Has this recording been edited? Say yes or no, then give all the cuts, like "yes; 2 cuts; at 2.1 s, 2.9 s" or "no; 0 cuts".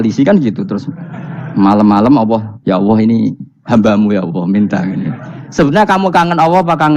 yes; 1 cut; at 2.5 s